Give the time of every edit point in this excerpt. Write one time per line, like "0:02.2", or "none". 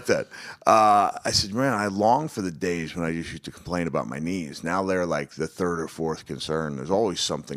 0:01.0

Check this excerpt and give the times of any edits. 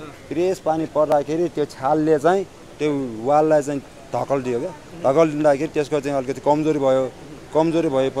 none

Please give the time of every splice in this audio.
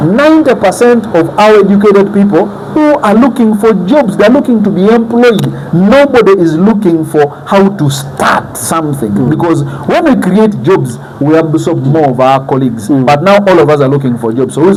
none

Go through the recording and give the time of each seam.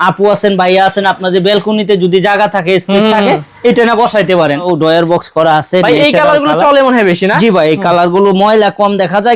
0:04.6

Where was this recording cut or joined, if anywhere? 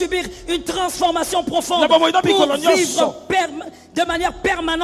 none

